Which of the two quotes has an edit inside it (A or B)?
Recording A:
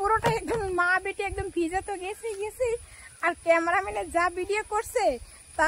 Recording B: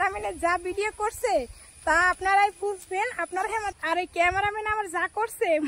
B